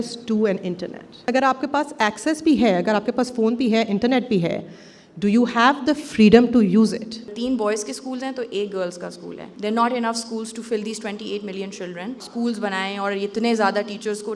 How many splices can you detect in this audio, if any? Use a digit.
4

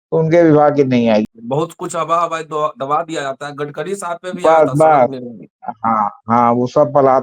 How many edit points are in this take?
1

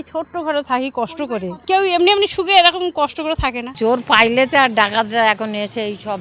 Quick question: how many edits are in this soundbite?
2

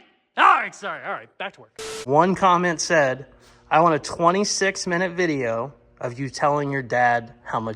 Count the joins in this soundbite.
1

